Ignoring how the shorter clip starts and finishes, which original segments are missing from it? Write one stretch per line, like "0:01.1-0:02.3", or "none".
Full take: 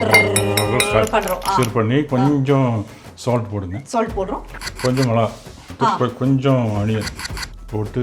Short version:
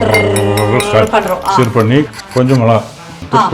0:02.1-0:04.6